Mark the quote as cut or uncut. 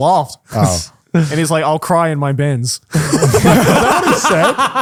uncut